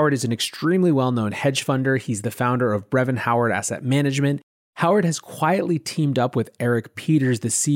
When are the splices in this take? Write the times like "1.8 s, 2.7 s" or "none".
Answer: 4.5 s